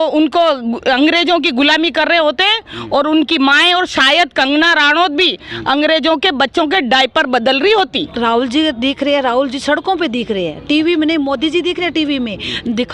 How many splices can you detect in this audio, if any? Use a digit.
1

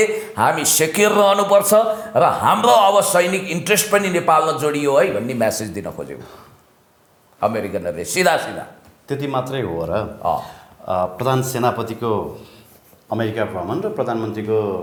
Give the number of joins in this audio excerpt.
0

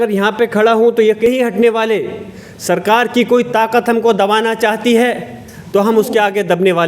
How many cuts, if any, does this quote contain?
1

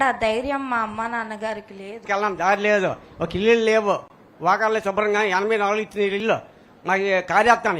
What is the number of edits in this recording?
1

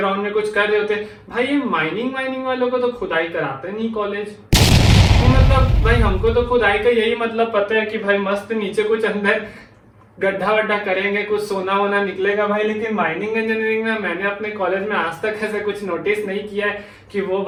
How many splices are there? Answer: 0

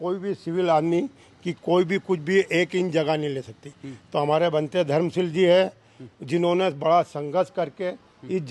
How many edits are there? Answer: 0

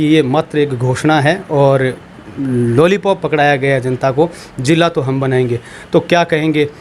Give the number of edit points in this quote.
0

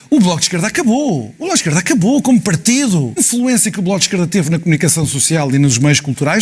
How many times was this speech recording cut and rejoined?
1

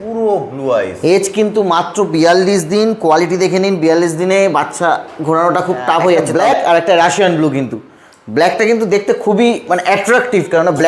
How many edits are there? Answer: 1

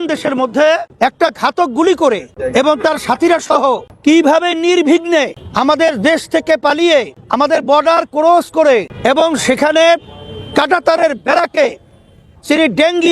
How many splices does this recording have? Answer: 6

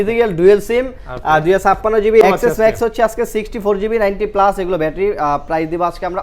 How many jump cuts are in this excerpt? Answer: 1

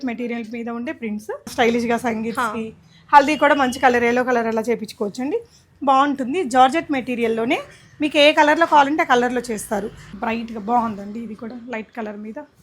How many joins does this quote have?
2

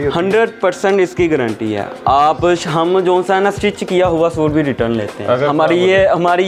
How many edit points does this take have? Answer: 0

